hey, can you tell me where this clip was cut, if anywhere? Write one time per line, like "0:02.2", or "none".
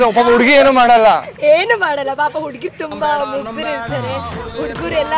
none